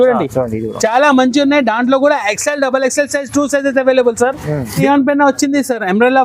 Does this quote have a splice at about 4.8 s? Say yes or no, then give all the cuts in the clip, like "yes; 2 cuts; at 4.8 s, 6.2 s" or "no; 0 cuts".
yes; 1 cut; at 4.8 s